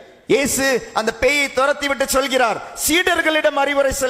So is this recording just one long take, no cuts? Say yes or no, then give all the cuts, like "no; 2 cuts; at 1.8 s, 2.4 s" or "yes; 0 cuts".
yes; 0 cuts